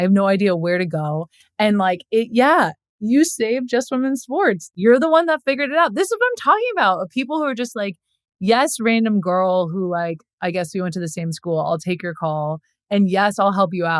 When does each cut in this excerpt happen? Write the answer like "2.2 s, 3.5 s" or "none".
4.7 s